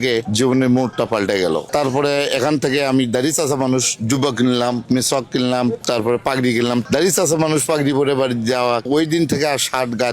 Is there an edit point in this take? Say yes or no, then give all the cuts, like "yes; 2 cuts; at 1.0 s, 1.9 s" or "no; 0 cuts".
yes; 3 cuts; at 1.7 s, 6.8 s, 8.9 s